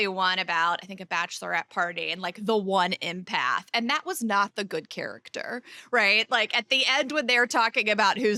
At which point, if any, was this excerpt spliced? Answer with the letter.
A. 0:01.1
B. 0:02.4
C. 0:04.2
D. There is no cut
D